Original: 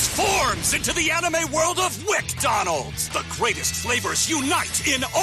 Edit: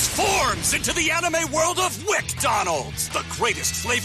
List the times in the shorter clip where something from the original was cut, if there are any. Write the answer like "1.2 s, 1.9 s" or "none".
none